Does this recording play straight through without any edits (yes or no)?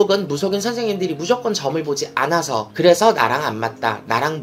yes